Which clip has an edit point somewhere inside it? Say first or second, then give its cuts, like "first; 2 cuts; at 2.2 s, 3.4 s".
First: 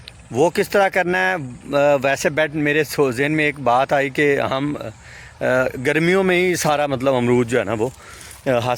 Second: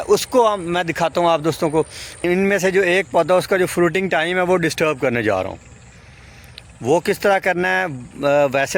second; 1 cut; at 2.0 s